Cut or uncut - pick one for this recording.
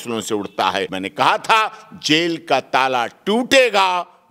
cut